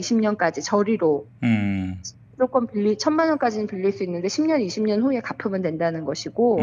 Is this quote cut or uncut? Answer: uncut